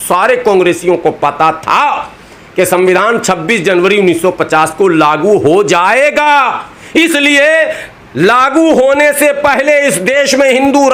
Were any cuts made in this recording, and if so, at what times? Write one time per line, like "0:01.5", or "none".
none